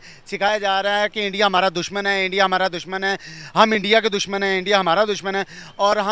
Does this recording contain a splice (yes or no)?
no